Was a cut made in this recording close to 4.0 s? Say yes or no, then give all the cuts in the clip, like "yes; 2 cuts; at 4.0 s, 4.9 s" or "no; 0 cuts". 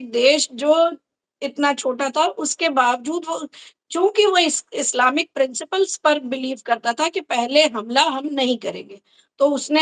no; 0 cuts